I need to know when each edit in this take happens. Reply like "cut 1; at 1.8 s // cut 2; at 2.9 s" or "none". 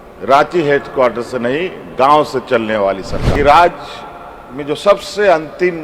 cut 1; at 3.2 s